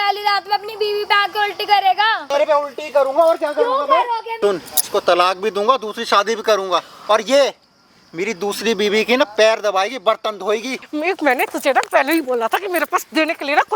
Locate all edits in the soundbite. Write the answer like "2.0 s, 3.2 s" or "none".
2.3 s, 4.3 s, 10.8 s